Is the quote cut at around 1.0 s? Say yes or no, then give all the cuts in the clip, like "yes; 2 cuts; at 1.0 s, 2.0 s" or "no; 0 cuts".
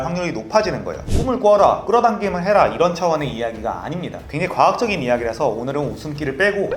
yes; 1 cut; at 1.0 s